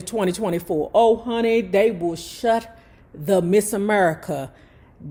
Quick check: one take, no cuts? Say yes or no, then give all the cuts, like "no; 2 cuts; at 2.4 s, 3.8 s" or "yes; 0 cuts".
yes; 0 cuts